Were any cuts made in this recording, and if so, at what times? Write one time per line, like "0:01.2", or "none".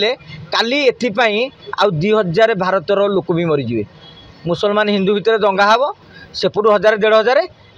none